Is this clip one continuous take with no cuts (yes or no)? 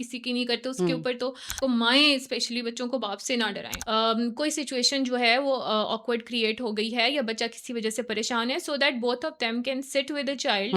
no